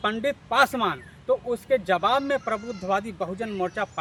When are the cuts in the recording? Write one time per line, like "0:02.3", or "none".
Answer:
none